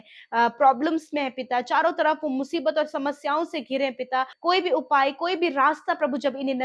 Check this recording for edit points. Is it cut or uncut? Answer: uncut